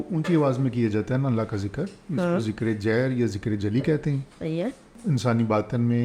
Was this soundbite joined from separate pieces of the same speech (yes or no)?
yes